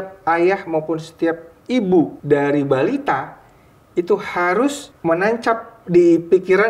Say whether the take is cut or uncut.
cut